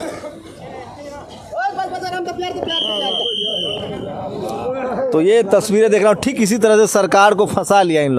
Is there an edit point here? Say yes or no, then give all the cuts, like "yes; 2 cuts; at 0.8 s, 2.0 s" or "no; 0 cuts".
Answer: no; 0 cuts